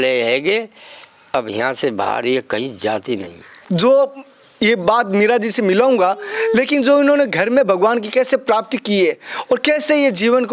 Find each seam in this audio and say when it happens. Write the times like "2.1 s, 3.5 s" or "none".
3.6 s